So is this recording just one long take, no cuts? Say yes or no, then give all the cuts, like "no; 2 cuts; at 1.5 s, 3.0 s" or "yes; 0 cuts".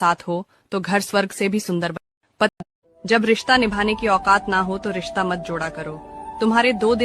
no; 1 cut; at 2.6 s